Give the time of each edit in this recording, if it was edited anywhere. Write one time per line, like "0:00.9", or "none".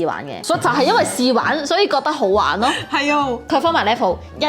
0:03.4